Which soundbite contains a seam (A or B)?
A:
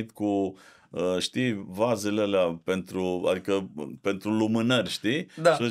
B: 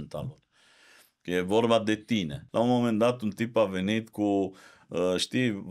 B